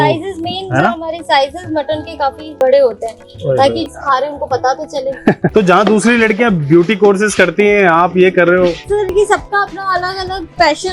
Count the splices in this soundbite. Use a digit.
3